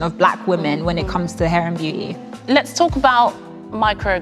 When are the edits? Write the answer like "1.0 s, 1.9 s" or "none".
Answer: none